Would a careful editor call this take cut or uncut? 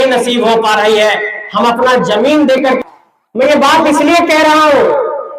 cut